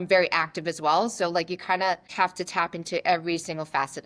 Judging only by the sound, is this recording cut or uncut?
cut